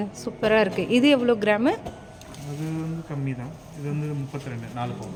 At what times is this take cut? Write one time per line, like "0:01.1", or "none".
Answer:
none